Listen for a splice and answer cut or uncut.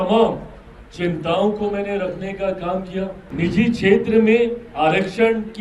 cut